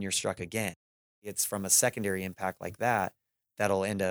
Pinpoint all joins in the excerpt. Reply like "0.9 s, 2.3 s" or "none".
1.3 s